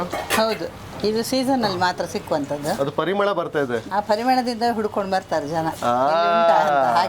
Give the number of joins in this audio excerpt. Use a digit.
2